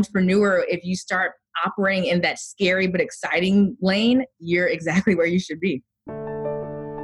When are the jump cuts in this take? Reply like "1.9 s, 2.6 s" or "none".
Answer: 6.1 s